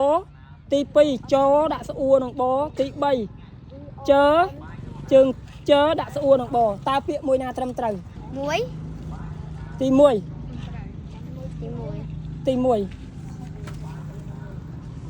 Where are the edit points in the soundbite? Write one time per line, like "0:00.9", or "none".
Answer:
0:08.2